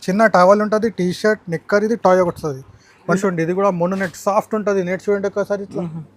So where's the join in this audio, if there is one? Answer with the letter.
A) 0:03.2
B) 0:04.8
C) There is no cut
A